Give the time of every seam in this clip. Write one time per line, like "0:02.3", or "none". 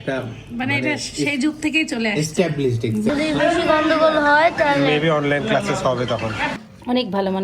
0:03.1
0:06.5